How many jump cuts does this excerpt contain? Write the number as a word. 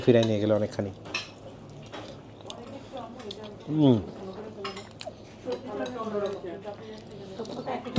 zero